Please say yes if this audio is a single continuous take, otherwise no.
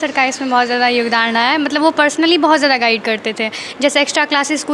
yes